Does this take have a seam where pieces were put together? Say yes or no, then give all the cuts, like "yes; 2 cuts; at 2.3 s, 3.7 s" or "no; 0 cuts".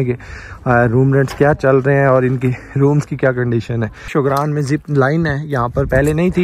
yes; 1 cut; at 4.0 s